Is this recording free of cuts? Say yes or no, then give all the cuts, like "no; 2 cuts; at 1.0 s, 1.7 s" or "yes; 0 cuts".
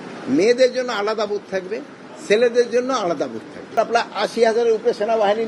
no; 1 cut; at 3.7 s